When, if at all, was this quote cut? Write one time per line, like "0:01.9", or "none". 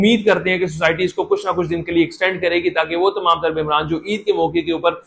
none